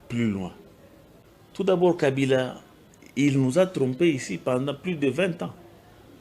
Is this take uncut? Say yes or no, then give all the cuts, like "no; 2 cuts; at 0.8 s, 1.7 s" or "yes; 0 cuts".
no; 1 cut; at 1.7 s